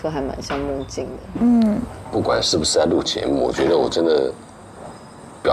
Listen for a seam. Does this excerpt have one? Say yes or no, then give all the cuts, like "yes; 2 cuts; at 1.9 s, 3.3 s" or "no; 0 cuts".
yes; 1 cut; at 2.0 s